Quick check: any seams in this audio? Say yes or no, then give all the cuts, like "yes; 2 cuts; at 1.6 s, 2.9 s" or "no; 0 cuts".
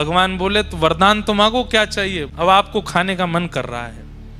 yes; 1 cut; at 2.2 s